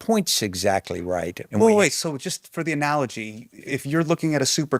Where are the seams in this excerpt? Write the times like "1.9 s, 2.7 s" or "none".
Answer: 1.4 s, 3.6 s